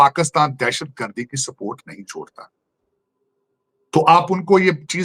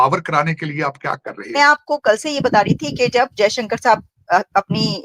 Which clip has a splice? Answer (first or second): second